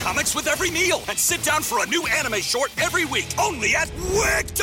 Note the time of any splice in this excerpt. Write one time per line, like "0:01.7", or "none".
none